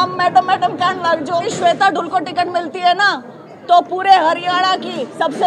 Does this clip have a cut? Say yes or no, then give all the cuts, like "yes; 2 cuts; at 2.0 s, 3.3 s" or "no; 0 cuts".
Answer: yes; 1 cut; at 1.5 s